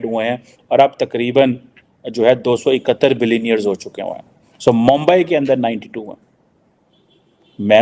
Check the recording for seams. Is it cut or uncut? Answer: uncut